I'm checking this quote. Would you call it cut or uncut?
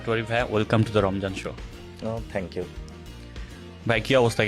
uncut